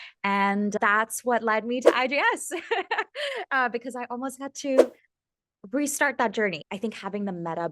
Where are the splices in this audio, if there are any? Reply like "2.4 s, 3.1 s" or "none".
0.7 s, 6.6 s